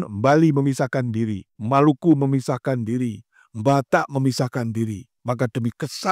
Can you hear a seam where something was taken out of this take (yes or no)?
yes